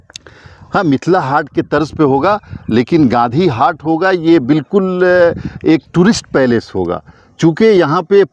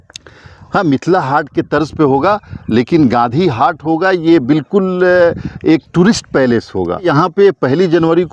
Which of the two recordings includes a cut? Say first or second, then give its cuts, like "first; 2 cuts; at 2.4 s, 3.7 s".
second; 1 cut; at 7.1 s